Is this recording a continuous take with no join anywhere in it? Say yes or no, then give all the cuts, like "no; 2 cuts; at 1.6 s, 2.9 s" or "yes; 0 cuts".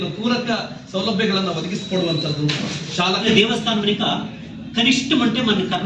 no; 1 cut; at 3.2 s